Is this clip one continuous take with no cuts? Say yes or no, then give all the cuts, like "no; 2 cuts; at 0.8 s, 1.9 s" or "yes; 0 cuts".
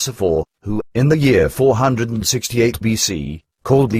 no; 1 cut; at 1.5 s